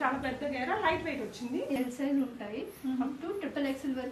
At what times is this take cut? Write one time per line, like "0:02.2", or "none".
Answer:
0:01.8